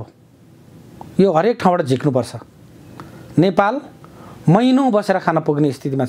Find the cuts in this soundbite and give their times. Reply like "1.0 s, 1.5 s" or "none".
none